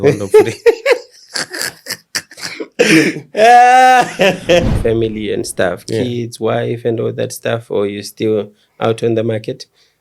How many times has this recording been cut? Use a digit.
1